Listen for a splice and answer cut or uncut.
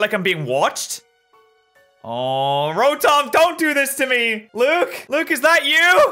cut